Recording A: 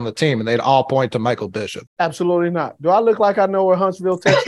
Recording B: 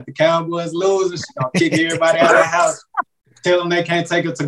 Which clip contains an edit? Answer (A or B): A